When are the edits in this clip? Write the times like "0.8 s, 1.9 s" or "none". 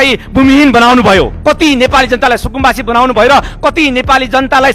1.3 s